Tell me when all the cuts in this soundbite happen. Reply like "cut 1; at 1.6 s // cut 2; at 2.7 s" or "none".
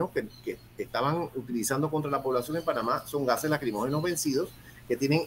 none